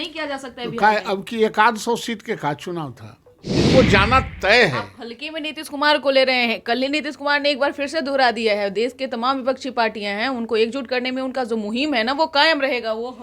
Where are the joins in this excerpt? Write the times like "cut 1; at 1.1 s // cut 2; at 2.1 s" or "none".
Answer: cut 1; at 3.6 s

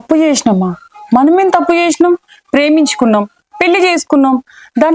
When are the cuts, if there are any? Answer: none

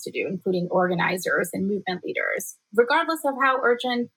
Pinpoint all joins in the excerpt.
none

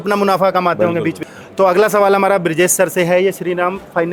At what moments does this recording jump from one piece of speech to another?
none

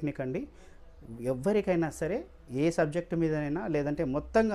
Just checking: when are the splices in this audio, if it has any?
none

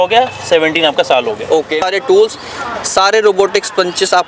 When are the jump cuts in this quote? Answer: cut 1; at 1.8 s

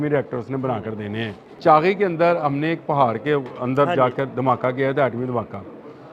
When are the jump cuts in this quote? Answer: cut 1; at 1.4 s

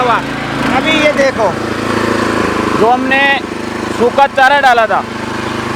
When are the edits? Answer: none

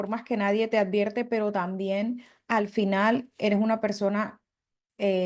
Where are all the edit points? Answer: none

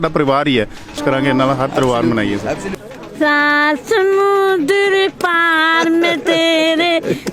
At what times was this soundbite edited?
cut 1; at 1.0 s // cut 2; at 2.8 s

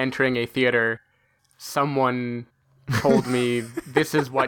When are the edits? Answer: none

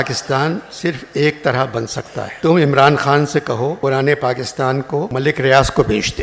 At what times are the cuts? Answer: cut 1; at 2.3 s // cut 2; at 3.8 s // cut 3; at 5.1 s

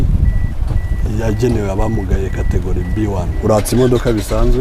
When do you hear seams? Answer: cut 1; at 3.3 s

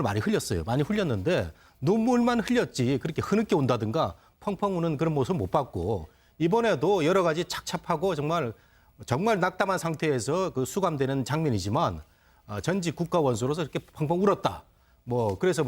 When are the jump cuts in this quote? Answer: cut 1; at 10.7 s

